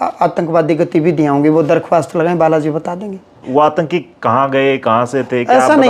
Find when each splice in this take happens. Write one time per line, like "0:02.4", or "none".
0:03.4